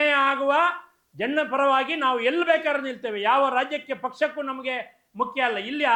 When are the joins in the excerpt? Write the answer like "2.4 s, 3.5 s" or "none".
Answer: none